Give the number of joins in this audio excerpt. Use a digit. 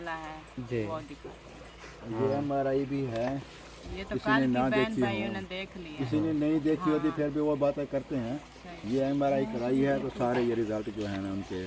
0